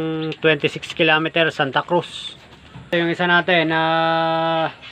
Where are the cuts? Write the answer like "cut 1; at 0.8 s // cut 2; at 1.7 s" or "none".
cut 1; at 2.9 s